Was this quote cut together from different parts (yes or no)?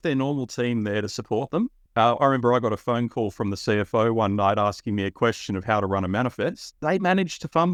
no